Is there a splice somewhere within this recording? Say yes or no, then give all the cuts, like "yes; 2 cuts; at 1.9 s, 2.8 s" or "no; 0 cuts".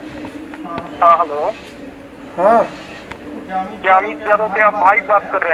no; 0 cuts